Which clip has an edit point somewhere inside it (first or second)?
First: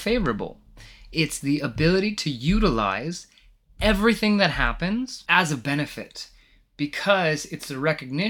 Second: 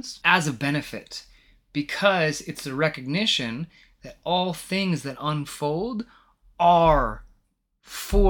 first